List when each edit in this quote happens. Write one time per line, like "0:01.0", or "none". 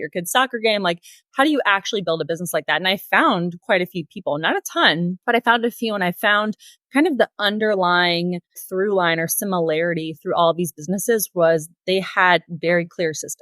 0:08.6